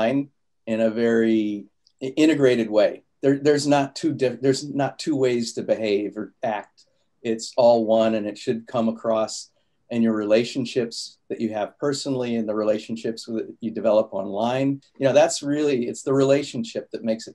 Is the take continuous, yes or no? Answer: no